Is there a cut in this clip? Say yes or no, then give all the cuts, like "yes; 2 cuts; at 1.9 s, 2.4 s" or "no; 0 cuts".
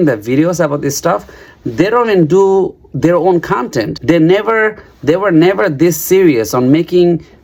no; 0 cuts